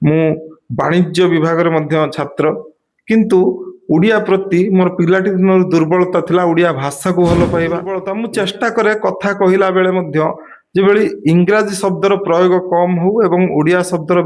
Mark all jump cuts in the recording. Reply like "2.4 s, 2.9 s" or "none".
8.0 s